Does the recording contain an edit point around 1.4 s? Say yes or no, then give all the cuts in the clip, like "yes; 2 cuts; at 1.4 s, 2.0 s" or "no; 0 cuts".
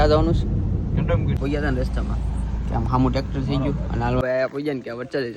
yes; 2 cuts; at 1.4 s, 4.2 s